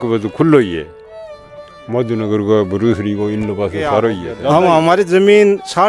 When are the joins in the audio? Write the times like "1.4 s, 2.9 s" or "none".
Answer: 4.3 s

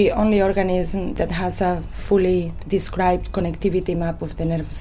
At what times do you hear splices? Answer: 1.1 s, 2.6 s

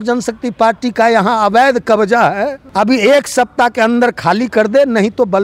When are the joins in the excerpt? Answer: 2.6 s

